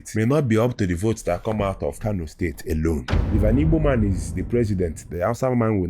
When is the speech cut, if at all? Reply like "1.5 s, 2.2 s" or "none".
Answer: 2.0 s, 3.2 s